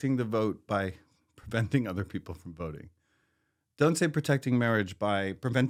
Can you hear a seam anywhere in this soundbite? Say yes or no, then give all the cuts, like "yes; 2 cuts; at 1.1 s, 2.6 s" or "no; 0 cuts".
no; 0 cuts